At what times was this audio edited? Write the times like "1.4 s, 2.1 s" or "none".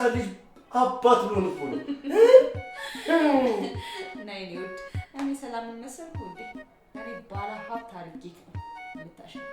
8.1 s